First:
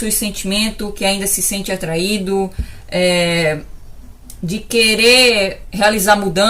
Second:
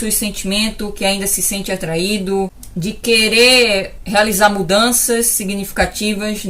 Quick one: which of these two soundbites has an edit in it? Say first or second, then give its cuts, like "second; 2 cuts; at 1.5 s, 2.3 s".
second; 1 cut; at 2.6 s